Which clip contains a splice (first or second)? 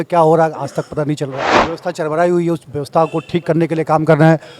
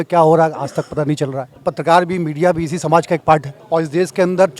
first